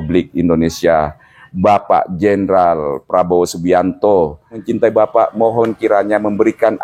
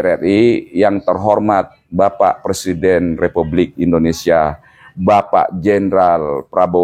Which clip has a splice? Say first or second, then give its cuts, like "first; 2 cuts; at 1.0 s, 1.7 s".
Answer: first; 1 cut; at 4.6 s